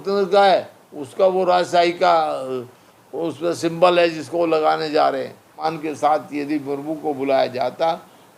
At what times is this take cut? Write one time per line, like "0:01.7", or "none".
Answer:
0:05.6